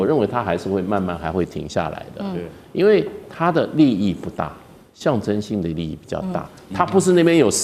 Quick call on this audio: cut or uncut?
uncut